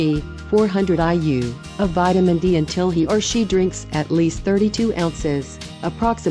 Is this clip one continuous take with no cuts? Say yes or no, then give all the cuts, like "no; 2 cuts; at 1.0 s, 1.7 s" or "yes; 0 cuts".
yes; 0 cuts